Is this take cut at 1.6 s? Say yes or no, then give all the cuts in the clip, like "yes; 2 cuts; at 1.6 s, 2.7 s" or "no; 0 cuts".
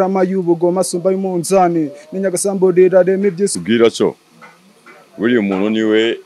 no; 1 cut; at 3.5 s